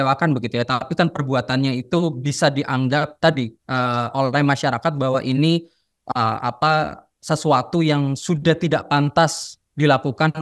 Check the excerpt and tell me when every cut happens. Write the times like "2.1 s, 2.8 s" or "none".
none